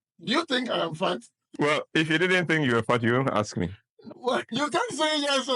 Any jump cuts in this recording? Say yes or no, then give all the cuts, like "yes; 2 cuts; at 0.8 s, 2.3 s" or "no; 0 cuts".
yes; 1 cut; at 4.5 s